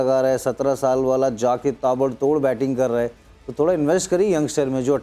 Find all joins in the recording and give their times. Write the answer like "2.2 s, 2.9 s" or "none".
none